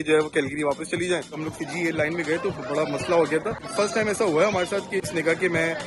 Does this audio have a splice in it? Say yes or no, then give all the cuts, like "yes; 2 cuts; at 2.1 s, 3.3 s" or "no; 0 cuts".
yes; 2 cuts; at 1.4 s, 5.1 s